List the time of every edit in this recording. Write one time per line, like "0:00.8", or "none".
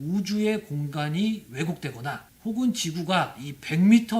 0:02.3